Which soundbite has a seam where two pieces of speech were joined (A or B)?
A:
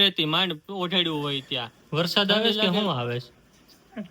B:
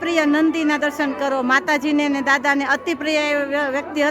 A